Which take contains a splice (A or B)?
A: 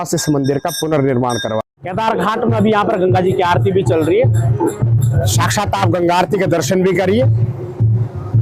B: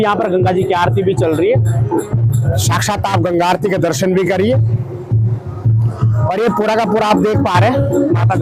A